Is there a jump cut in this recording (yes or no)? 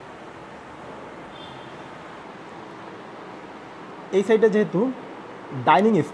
yes